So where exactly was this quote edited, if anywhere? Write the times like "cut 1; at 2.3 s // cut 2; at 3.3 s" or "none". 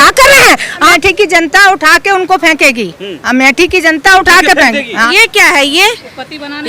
cut 1; at 0.9 s // cut 2; at 5.0 s